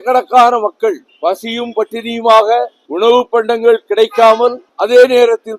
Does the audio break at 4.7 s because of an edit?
yes; 3 cuts; at 1.1 s, 2.8 s, 4.7 s

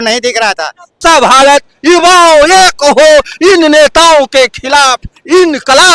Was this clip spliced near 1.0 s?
yes; 1 cut; at 1.0 s

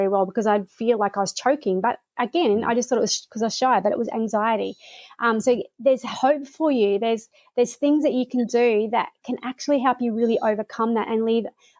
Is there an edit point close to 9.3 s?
no; 0 cuts

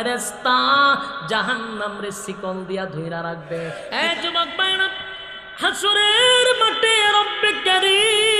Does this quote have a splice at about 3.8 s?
yes; 1 cut; at 3.8 s

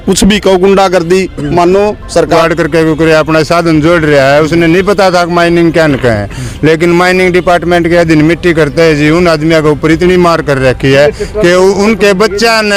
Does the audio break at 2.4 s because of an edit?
yes; 1 cut; at 2.4 s

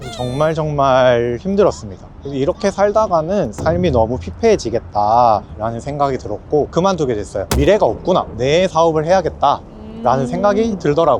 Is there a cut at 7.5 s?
yes; 1 cut; at 7.5 s

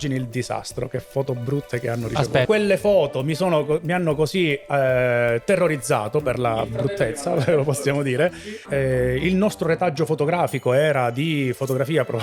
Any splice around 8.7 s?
yes; 2 cuts; at 2.4 s, 8.7 s

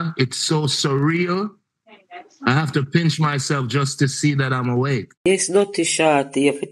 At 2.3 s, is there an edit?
no; 1 cut; at 5.2 s

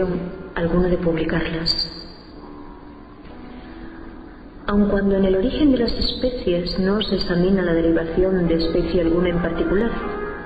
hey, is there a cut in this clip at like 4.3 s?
no; 1 cut; at 2.4 s

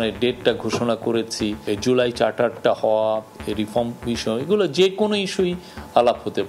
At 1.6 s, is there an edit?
yes; 1 cut; at 1.6 s

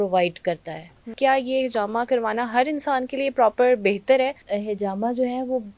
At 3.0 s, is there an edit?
no; 2 cuts; at 1.1 s, 4.5 s

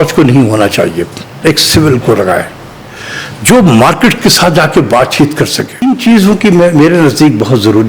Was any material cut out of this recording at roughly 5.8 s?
yes; 2 cuts; at 1.4 s, 5.8 s

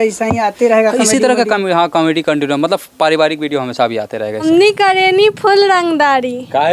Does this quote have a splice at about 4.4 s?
yes; 1 cut; at 4.4 s

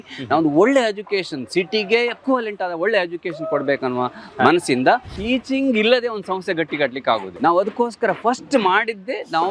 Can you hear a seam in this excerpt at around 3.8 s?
no; 3 cuts; at 2.2 s, 5.1 s, 7.4 s

